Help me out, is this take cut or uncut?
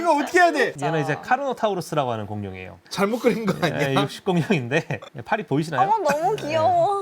cut